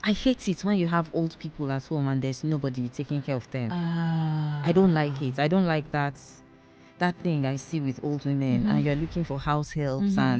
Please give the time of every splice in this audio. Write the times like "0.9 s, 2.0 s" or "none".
none